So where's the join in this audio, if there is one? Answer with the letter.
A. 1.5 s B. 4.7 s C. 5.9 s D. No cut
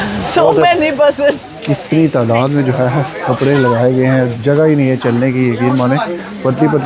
A